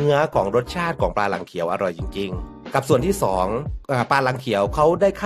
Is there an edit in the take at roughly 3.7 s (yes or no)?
yes